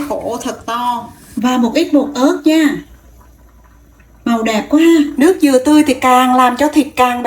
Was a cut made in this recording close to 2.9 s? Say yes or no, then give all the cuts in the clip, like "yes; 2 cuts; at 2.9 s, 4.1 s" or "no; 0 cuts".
no; 2 cuts; at 1.2 s, 5.1 s